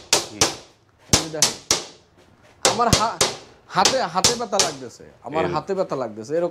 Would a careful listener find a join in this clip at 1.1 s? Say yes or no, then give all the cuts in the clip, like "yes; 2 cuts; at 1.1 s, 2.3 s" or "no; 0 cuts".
no; 0 cuts